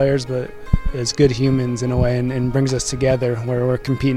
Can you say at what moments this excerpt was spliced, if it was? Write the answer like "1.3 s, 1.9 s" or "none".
2.5 s